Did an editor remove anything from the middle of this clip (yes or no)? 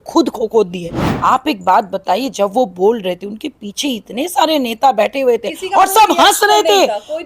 yes